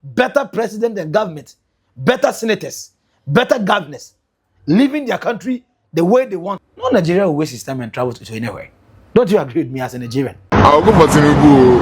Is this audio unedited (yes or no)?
no